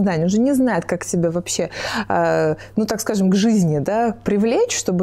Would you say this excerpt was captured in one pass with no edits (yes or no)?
yes